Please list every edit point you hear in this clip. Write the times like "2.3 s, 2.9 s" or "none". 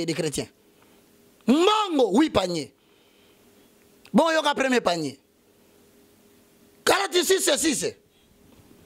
none